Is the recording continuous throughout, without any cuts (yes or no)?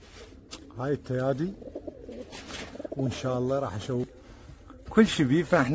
no